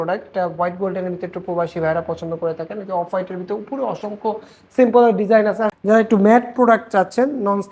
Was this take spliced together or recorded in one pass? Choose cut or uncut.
cut